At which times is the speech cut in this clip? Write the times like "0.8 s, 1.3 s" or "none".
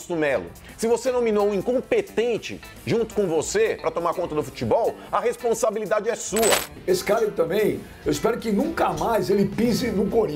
6.8 s

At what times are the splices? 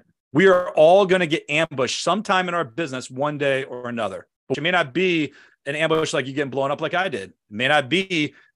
4.5 s

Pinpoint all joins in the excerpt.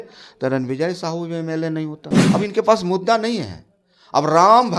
2.1 s

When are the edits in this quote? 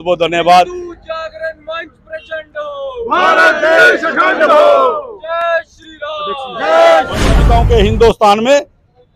7.4 s

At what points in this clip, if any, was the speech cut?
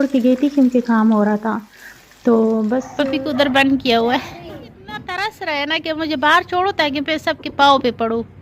2.9 s, 5.1 s

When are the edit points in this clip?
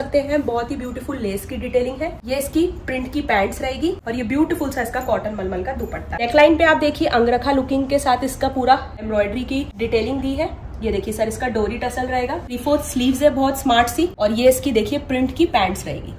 2.2 s, 4.0 s, 6.2 s, 9.3 s, 12.5 s, 14.1 s

